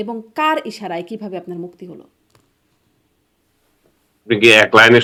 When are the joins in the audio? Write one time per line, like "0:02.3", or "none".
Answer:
none